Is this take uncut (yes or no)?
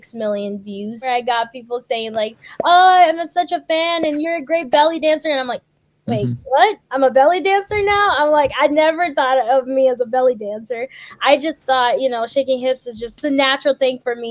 no